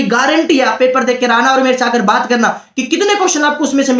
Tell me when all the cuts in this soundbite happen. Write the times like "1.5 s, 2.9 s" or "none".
none